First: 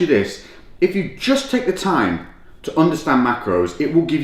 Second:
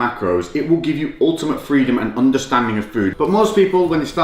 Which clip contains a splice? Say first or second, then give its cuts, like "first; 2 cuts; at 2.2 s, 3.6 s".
second; 1 cut; at 3.1 s